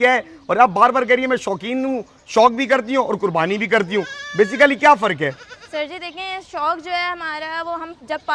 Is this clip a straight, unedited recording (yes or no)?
yes